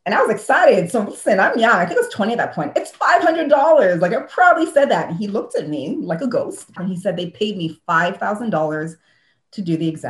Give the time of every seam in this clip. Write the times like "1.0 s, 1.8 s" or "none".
6.8 s